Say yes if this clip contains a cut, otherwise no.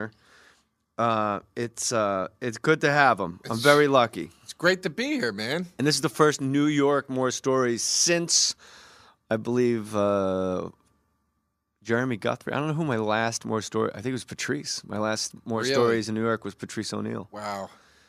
yes